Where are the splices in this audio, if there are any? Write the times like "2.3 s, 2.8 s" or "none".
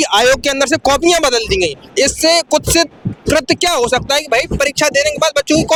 none